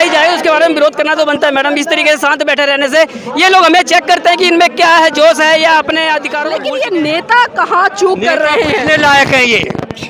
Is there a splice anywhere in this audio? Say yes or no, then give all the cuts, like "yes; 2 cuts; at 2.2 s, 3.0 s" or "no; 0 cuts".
yes; 1 cut; at 6.5 s